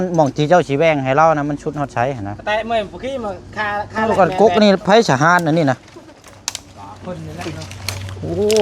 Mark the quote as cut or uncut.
cut